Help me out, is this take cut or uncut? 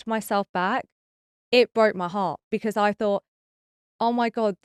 uncut